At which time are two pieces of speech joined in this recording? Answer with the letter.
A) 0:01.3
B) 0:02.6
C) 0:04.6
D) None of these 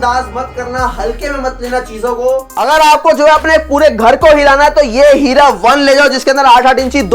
B